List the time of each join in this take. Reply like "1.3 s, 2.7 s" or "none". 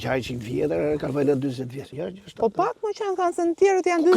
1.9 s